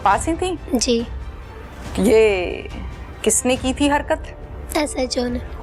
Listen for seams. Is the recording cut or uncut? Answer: uncut